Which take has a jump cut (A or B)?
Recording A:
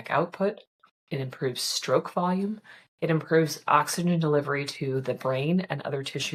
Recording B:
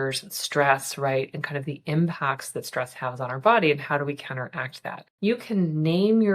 B